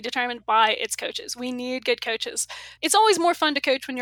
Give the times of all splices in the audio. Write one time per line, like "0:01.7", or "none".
0:02.7